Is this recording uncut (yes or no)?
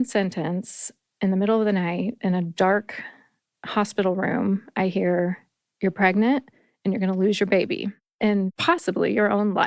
no